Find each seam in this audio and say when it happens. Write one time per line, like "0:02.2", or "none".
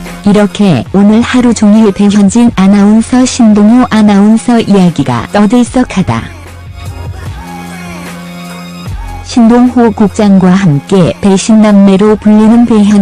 0:05.1